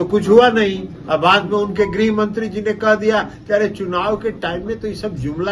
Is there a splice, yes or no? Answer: no